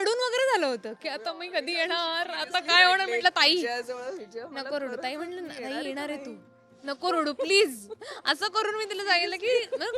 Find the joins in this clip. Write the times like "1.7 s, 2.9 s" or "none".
none